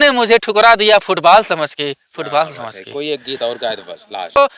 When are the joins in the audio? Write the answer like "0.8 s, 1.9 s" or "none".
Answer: none